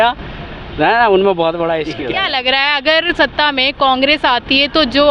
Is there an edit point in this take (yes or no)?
no